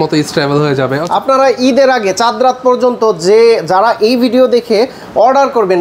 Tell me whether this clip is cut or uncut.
cut